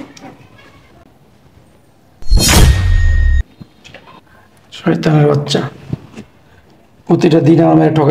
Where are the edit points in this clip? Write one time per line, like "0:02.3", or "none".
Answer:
0:01.0